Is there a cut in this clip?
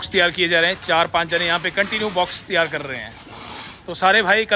no; 0 cuts

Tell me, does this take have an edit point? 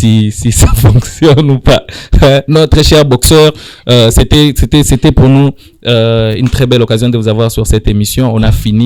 no; 0 cuts

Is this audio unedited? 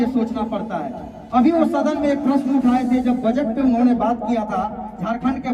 yes; 0 cuts

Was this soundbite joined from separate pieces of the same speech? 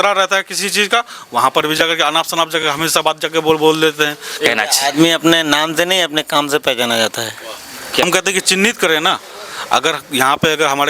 yes; 2 cuts; at 4.4 s, 8.0 s

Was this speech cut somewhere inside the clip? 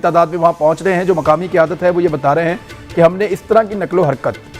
no; 0 cuts

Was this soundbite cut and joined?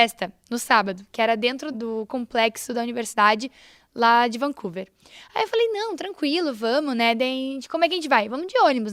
no; 0 cuts

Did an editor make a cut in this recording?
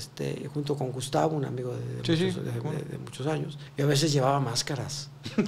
yes; 1 cut; at 3.6 s

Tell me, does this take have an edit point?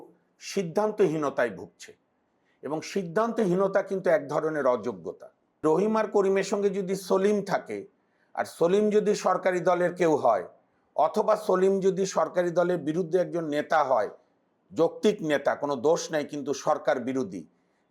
yes; 1 cut; at 5.6 s

